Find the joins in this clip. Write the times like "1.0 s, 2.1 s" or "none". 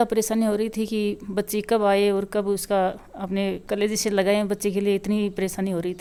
none